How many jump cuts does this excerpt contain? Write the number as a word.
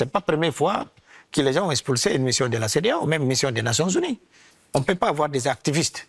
one